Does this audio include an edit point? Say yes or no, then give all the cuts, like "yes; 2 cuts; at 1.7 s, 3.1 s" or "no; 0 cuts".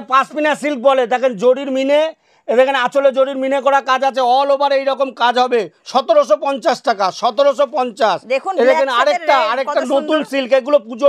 no; 0 cuts